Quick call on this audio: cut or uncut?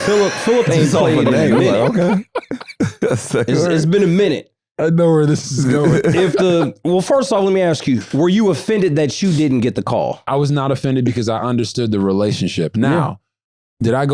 cut